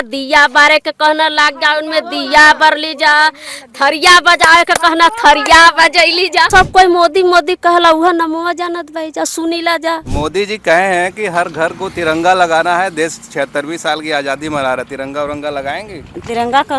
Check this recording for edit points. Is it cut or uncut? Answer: cut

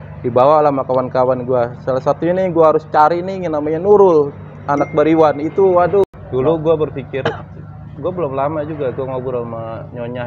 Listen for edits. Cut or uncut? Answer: cut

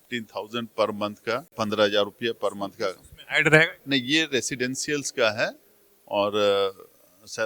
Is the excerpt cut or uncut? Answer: cut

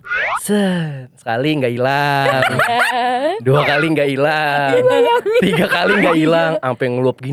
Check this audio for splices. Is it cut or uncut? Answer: uncut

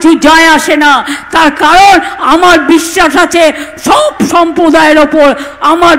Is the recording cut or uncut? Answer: uncut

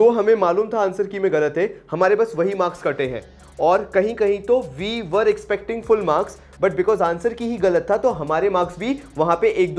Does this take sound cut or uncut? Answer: uncut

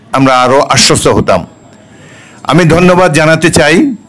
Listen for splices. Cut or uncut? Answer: uncut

